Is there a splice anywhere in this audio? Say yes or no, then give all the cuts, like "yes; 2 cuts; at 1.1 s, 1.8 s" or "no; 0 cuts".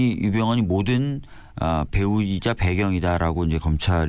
no; 0 cuts